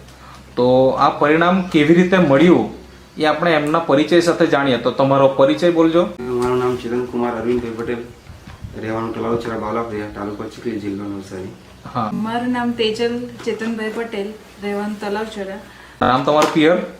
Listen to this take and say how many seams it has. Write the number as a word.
three